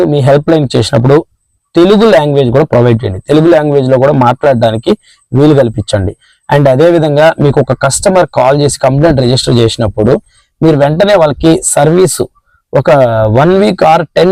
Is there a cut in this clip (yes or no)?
no